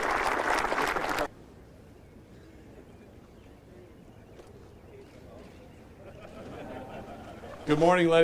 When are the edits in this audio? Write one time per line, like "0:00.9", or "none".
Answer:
0:01.3

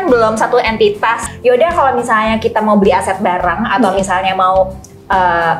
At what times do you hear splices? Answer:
0:01.3

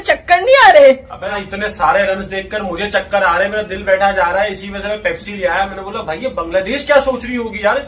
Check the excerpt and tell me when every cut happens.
0:01.4

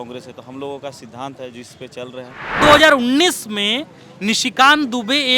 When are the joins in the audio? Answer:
0:02.6

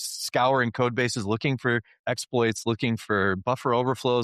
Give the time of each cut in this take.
0:02.0

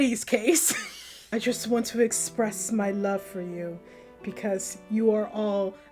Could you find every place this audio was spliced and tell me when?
0:01.2

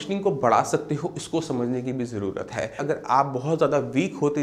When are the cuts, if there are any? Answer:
0:02.8

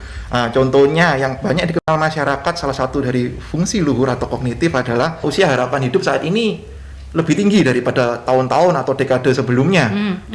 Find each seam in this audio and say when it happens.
0:05.2

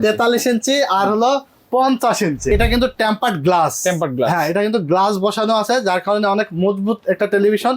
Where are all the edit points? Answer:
0:02.5

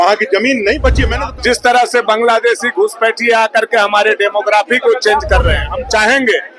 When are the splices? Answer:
0:01.1
0:05.7

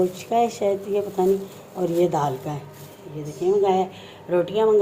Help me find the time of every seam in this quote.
none

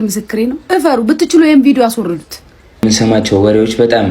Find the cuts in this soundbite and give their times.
0:02.8

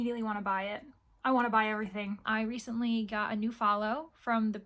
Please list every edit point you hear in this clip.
0:02.2

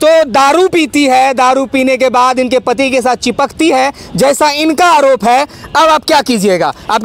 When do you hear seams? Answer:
none

